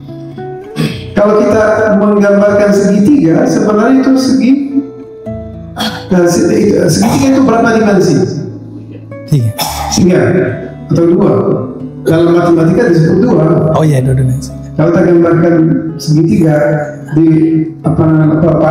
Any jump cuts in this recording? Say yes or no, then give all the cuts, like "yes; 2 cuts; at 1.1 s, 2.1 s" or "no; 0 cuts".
no; 0 cuts